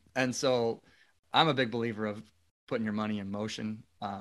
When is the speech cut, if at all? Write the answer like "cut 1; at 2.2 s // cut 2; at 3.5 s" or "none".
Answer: cut 1; at 1.1 s

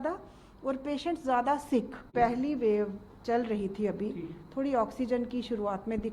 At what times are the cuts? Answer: cut 1; at 2.1 s

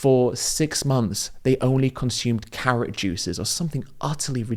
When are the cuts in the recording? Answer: none

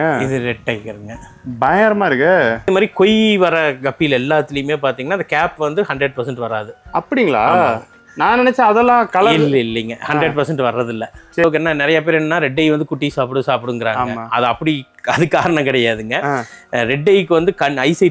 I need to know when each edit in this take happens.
cut 1; at 2.7 s // cut 2; at 11.4 s

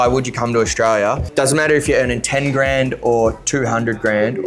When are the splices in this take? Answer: cut 1; at 1.2 s

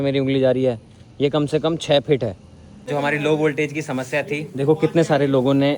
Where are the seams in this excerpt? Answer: cut 1; at 2.9 s

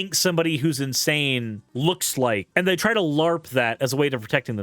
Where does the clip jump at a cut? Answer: cut 1; at 1.6 s // cut 2; at 2.5 s

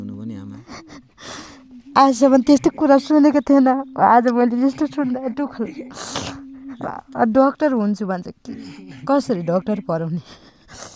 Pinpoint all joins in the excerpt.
cut 1; at 1.8 s

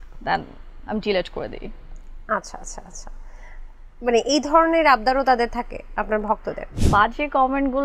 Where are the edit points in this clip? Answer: cut 1; at 6.7 s

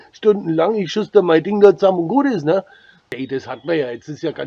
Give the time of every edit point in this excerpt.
cut 1; at 3.1 s

